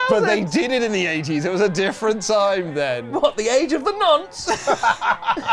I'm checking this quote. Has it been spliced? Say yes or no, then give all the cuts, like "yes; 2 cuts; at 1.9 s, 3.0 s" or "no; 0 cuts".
no; 0 cuts